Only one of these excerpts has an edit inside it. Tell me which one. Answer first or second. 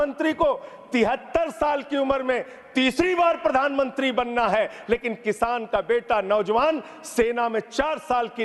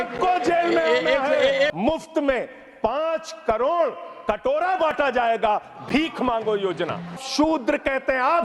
second